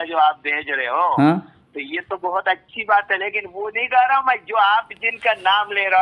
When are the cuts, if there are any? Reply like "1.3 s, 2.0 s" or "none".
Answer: none